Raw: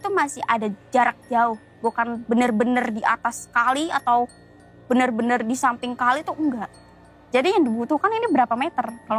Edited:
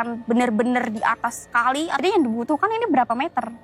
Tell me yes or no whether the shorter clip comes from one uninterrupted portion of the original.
no